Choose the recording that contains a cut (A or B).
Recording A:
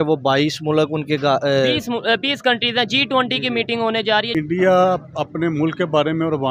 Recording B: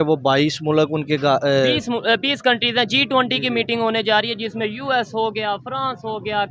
A